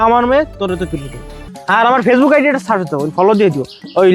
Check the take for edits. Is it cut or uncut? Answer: cut